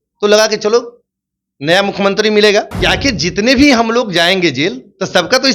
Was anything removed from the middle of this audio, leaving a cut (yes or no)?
yes